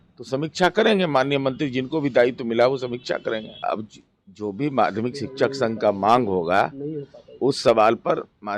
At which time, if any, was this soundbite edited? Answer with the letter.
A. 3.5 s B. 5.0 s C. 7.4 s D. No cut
A